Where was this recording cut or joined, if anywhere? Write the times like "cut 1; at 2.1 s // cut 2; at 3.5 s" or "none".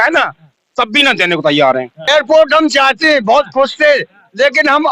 cut 1; at 1.9 s